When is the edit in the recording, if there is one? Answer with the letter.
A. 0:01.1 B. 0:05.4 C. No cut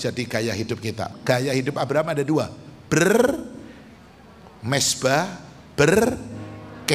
A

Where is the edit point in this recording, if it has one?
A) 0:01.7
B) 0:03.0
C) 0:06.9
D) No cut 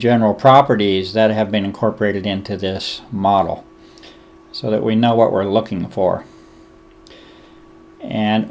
D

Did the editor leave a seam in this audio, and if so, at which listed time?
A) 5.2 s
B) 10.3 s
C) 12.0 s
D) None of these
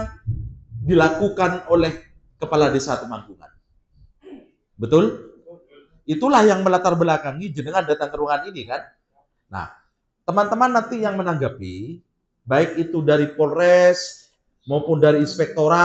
D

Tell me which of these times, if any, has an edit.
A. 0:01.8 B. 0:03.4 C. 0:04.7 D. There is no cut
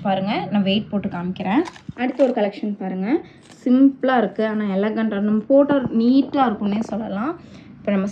A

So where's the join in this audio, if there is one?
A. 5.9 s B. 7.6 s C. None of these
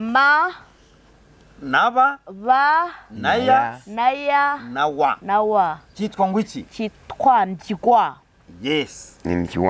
C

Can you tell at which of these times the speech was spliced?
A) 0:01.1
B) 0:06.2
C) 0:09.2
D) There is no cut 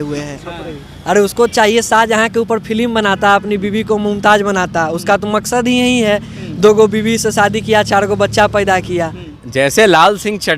C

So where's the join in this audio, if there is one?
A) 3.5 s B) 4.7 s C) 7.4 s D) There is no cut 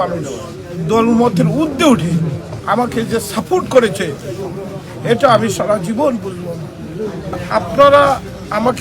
C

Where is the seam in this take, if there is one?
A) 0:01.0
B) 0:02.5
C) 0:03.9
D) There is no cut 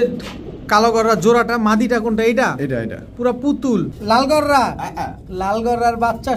C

